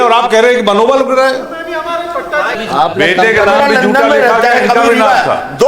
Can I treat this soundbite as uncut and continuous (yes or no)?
no